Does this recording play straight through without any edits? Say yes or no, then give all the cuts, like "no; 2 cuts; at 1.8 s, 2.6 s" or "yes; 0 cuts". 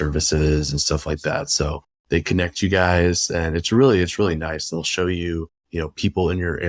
yes; 0 cuts